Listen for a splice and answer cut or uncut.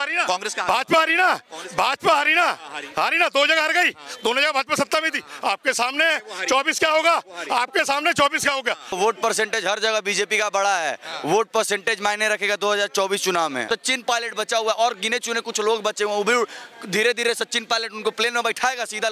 cut